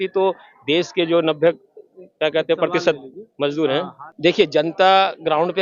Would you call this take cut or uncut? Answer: cut